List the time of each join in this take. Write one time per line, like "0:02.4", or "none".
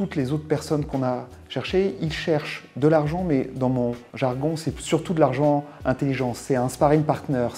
0:04.1